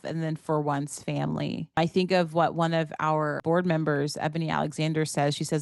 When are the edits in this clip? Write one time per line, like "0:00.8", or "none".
0:01.8
0:03.4

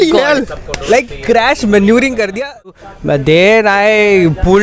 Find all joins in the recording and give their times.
0:02.9

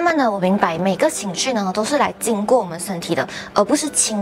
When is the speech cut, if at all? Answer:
none

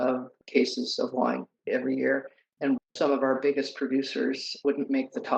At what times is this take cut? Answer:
none

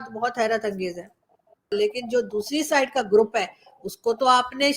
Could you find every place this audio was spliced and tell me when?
0:01.7

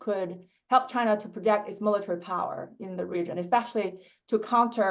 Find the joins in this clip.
none

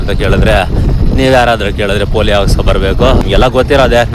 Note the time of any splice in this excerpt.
0:03.2

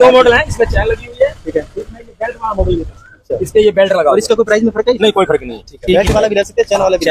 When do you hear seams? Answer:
none

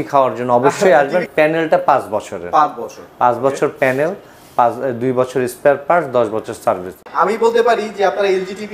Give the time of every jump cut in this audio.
0:01.2
0:07.1

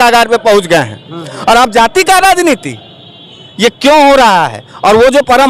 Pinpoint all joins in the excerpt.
none

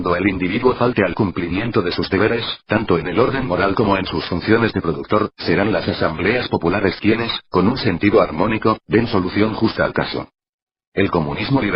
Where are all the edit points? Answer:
0:01.9

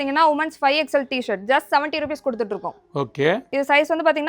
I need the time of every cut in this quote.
none

